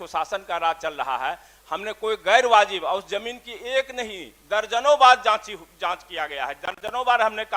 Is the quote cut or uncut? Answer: uncut